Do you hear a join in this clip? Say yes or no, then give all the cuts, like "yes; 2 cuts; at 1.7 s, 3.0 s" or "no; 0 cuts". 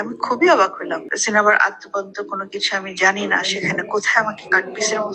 yes; 1 cut; at 1.1 s